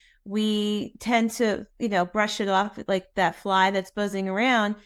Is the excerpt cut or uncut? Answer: uncut